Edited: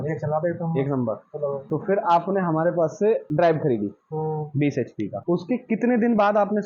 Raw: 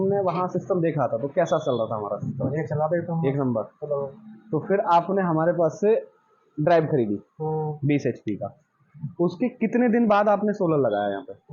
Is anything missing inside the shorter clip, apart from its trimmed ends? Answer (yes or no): yes